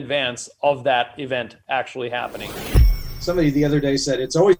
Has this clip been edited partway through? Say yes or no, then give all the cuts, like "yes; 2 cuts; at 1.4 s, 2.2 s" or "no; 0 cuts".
yes; 1 cut; at 2.7 s